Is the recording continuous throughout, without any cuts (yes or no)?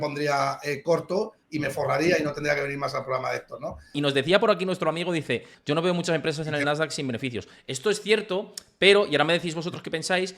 no